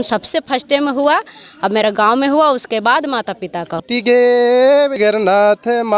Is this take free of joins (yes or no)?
no